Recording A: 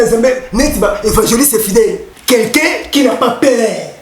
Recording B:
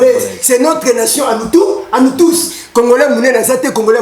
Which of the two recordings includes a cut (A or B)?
A